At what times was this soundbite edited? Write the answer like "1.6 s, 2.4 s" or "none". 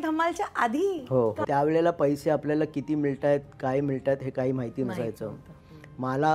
1.4 s